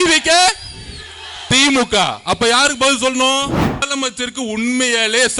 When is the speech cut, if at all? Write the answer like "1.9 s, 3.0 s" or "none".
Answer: 3.9 s